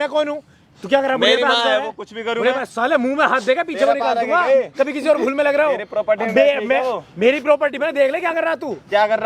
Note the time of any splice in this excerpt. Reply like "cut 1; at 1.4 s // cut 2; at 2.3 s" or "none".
none

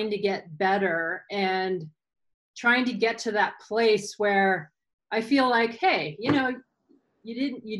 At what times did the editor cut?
none

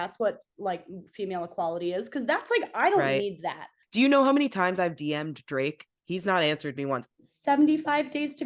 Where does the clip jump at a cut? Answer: cut 1; at 3.7 s // cut 2; at 7.1 s

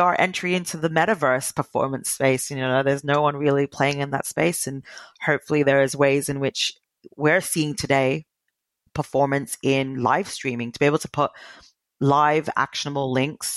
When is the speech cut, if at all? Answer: none

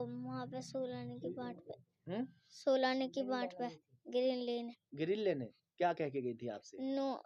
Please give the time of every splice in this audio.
none

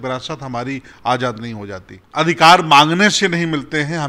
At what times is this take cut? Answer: cut 1; at 2.0 s

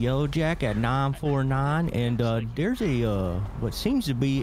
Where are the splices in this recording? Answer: none

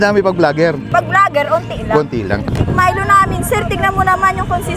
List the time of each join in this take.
cut 1; at 2.4 s

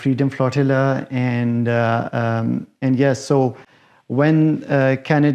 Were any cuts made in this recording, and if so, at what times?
none

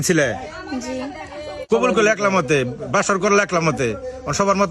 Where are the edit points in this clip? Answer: cut 1; at 1.7 s

